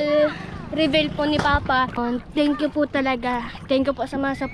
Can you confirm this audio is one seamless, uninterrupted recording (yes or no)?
no